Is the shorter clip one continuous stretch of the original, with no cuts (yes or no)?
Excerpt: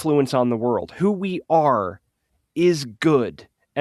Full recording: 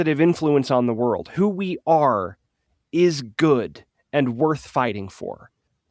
yes